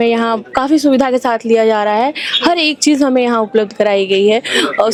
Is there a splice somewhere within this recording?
no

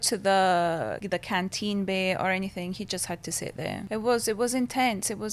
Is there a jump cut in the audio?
yes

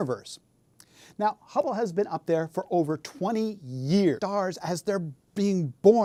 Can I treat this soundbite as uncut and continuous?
yes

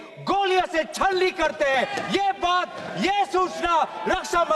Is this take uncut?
yes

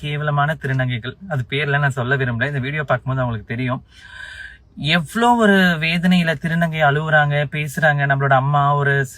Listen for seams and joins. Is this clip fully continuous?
yes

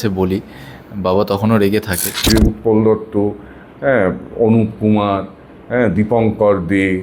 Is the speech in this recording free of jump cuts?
no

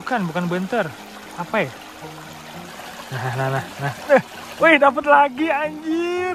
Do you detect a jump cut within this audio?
yes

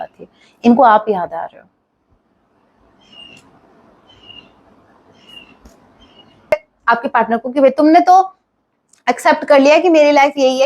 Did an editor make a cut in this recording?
yes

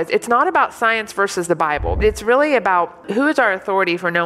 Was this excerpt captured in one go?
no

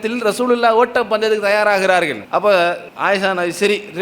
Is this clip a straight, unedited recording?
no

